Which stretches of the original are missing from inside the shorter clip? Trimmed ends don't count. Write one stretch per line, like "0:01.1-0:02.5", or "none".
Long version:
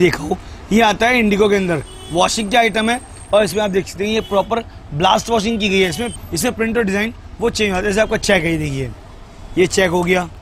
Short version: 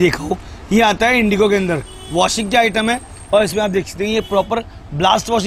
none

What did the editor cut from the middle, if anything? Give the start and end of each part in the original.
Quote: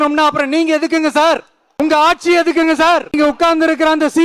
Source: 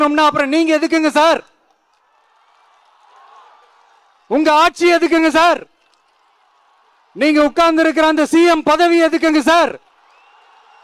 0:01.6-0:04.1
0:05.7-0:07.3

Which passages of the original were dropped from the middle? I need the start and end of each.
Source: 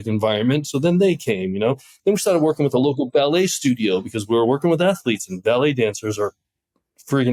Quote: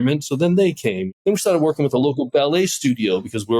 0:01.5-0:01.9

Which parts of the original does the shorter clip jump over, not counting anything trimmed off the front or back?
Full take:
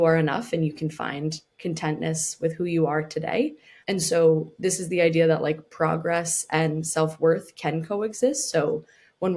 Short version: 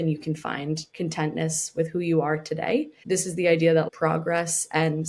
0:01.4-0:01.5
0:03.6-0:04.5
0:05.4-0:05.7

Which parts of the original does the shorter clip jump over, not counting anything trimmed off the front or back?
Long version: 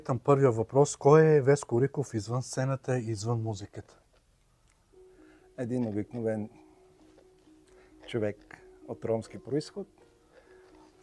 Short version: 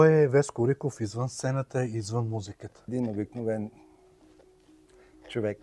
0:04.0-0:05.7

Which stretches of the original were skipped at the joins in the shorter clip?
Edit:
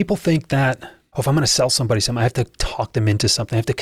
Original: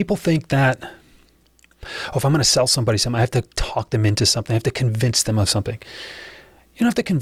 0:01.0-0:01.9

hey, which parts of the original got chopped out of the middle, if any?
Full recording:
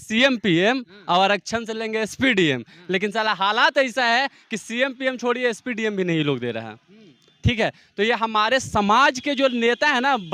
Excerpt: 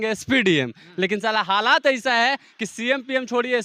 none

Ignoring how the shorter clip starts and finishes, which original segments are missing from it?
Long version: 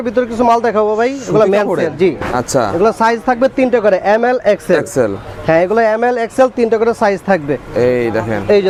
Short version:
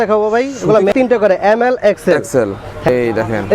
0:01.6-0:03.5
0:05.5-0:07.9

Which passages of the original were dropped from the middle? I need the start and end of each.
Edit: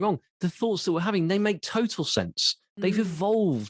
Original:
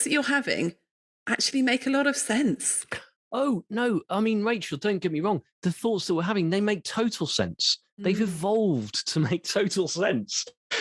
none

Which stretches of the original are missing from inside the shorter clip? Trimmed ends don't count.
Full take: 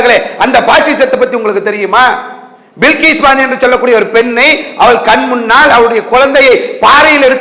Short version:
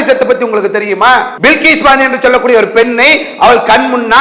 0:02.2-0:02.7

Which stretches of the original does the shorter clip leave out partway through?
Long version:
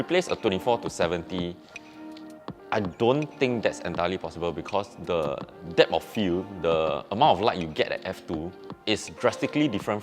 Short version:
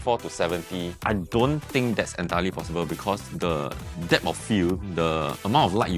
0:01.5-0:02.6

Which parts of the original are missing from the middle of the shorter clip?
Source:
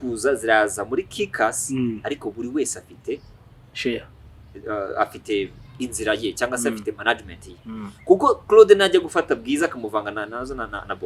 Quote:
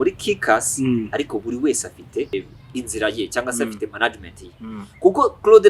0:03.2-0:05.4

